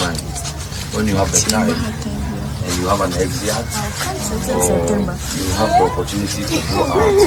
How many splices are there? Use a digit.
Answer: 0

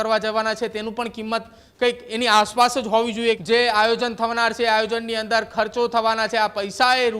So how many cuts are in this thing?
1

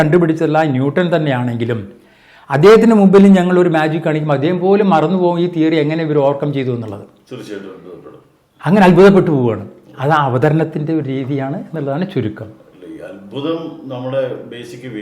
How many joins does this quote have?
0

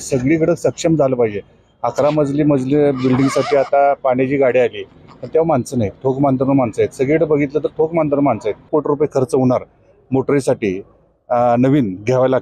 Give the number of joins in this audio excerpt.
1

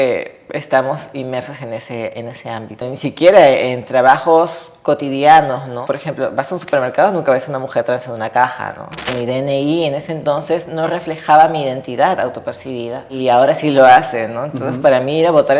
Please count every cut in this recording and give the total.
4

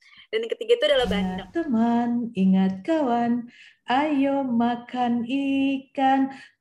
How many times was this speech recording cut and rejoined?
1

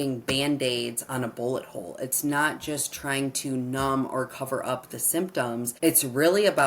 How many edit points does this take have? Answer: 1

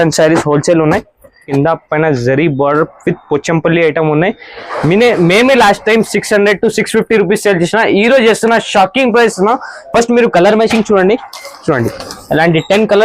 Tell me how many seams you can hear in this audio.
1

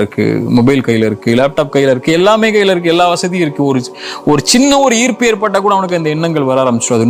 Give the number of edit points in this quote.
0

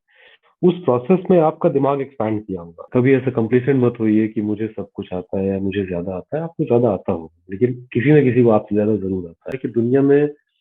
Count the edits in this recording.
2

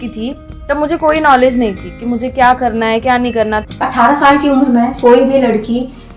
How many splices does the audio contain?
1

